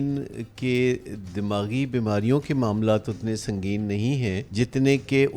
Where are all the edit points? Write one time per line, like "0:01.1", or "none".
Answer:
0:04.4